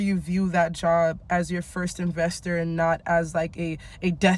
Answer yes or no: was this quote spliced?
no